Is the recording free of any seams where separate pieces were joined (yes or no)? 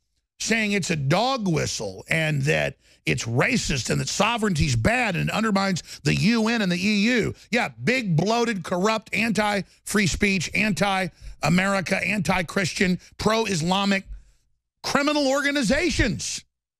yes